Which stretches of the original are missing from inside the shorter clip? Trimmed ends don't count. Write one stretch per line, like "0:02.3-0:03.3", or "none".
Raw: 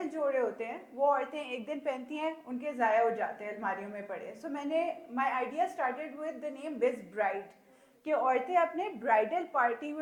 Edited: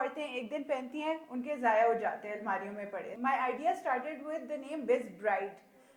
0:04.3-0:05.0